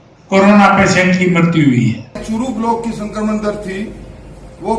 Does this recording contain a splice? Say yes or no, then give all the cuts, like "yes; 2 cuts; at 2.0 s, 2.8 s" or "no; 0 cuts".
yes; 1 cut; at 2.2 s